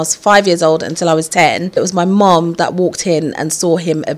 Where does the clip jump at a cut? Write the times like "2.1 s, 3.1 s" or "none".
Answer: 1.7 s